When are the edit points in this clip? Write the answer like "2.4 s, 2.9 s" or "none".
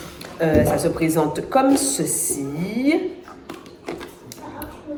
none